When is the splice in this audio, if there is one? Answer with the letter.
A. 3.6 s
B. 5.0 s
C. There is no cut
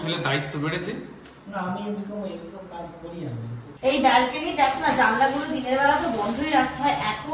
A